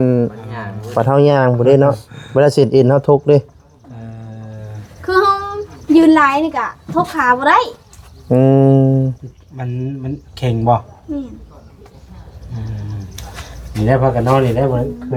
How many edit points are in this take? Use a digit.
0